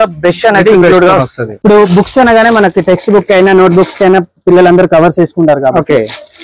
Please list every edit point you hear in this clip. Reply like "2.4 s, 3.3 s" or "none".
1.4 s